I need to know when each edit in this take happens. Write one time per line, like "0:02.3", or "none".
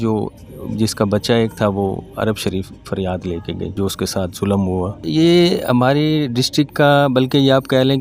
0:03.7
0:05.0